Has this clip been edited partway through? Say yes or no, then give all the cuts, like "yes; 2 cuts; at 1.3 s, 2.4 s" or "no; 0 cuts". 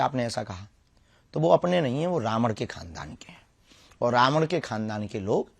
no; 0 cuts